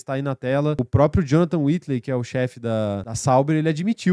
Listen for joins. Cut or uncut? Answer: cut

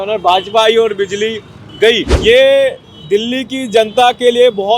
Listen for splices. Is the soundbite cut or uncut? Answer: cut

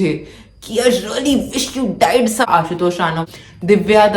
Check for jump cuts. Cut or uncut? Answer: cut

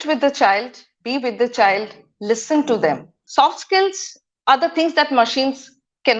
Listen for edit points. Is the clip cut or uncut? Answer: cut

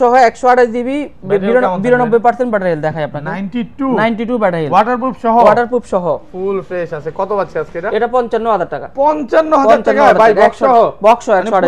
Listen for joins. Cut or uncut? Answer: uncut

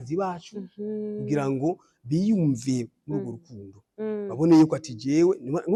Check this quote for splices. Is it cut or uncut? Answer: uncut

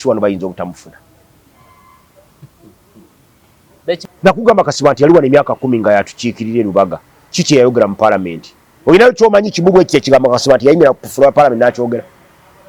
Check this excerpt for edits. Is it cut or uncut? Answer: cut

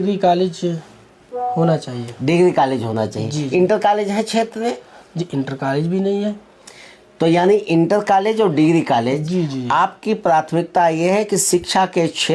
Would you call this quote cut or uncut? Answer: uncut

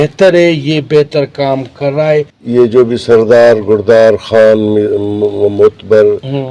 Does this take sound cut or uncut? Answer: cut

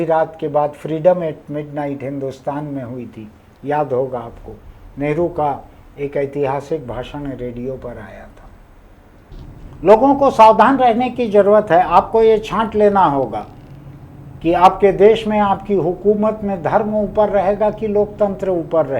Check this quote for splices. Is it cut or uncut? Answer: cut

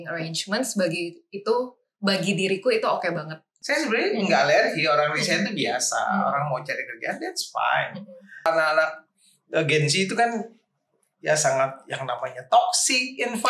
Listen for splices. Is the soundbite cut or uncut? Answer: cut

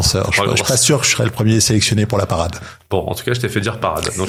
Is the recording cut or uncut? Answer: uncut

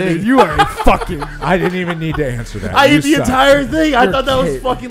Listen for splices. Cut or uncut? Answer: cut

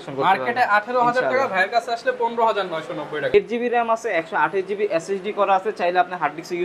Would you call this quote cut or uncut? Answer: cut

